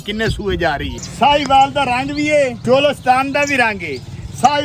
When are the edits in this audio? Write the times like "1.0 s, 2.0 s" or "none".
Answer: 1.0 s, 2.6 s

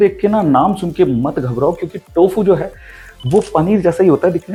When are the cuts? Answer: none

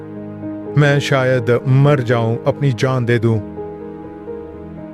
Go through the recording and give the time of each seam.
none

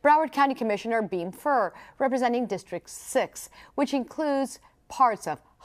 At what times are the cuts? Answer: 3.3 s

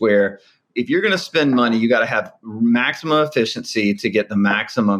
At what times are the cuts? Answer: none

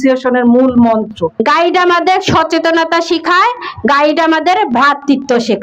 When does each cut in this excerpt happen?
1.3 s

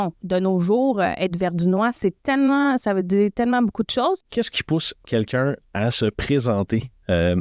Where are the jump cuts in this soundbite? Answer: 4.2 s

